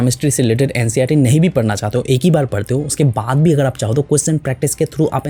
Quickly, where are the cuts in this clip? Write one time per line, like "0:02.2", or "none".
none